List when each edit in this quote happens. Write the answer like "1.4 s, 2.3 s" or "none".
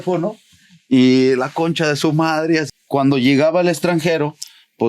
2.6 s